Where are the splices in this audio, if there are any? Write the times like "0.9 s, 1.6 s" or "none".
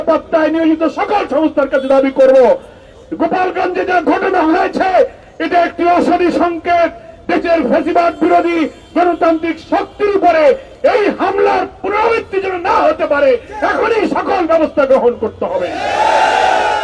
none

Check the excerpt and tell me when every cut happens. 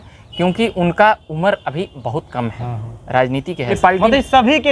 3.7 s

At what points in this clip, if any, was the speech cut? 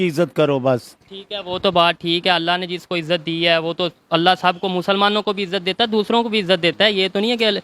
none

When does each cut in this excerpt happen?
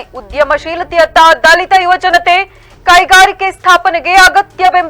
none

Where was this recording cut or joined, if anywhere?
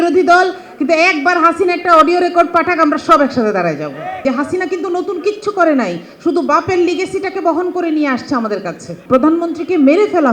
4.2 s, 9.0 s

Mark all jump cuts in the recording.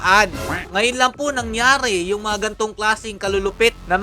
none

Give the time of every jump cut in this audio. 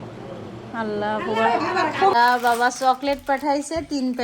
2.1 s

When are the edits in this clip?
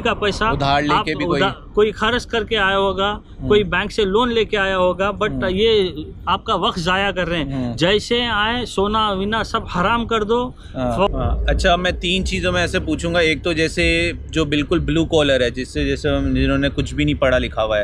11.1 s

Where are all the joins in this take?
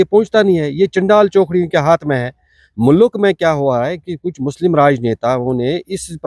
none

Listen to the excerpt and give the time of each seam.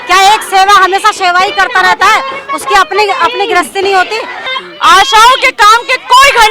4.4 s

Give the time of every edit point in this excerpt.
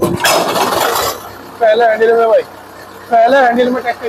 none

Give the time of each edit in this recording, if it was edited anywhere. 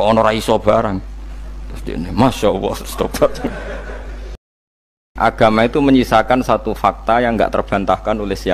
4.9 s

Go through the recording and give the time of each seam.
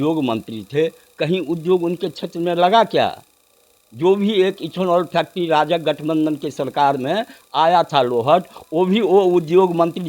none

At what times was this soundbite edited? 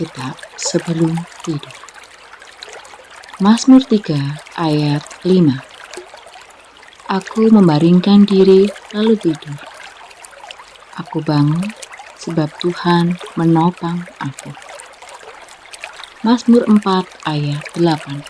none

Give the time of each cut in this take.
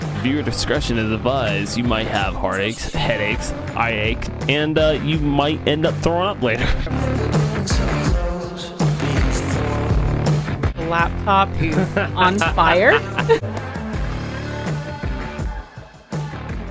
13.4 s

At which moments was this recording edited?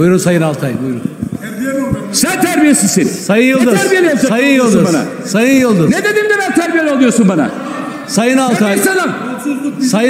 none

